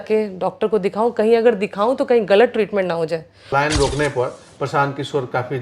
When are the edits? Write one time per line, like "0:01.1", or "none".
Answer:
0:03.4